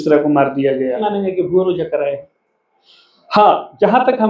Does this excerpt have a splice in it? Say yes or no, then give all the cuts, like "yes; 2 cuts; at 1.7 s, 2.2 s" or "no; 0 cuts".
yes; 1 cut; at 1.1 s